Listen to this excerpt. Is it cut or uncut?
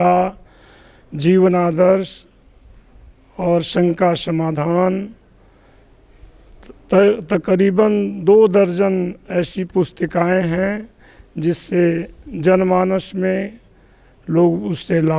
uncut